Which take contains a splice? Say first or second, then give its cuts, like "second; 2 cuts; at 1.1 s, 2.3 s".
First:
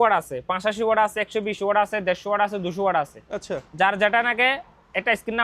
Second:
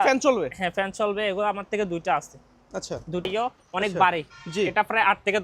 second; 1 cut; at 3.3 s